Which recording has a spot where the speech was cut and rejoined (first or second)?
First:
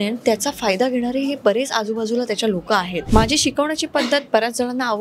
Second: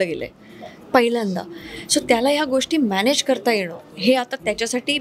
first